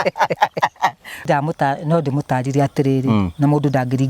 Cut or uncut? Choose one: cut